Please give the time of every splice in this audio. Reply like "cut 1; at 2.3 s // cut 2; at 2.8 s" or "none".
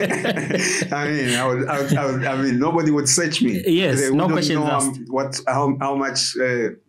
none